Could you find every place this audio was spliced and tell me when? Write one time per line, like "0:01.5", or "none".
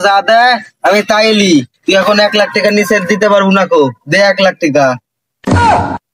none